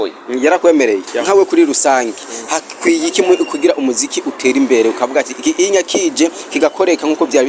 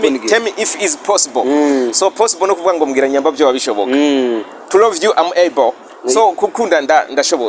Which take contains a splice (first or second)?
first